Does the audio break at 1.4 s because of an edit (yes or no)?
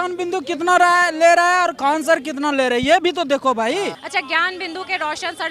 no